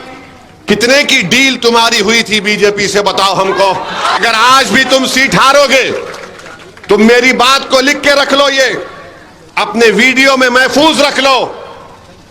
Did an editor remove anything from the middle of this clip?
yes; 1 cut; at 4.2 s

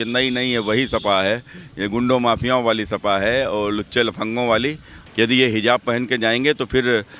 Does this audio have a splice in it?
yes; 1 cut; at 4.9 s

